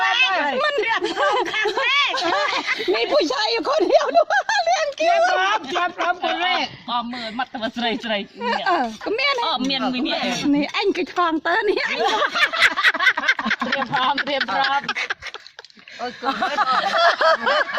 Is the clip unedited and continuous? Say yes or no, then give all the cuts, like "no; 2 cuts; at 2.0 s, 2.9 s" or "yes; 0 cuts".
yes; 0 cuts